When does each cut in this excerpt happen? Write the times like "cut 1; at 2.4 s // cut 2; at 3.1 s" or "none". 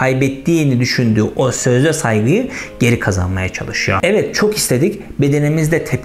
cut 1; at 4.0 s